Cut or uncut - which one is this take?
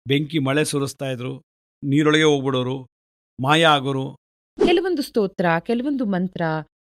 cut